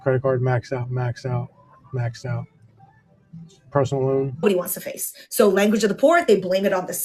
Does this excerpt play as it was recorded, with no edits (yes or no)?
no